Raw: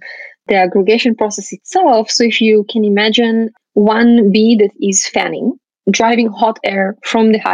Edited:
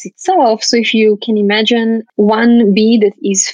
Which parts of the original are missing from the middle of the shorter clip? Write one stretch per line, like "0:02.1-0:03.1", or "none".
0:03.5-0:03.6